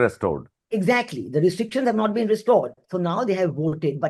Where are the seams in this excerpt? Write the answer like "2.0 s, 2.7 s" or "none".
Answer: 2.8 s